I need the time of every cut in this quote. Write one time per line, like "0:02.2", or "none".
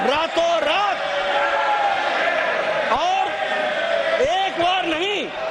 none